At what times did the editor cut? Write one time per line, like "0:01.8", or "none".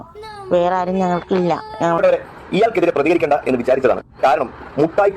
0:02.0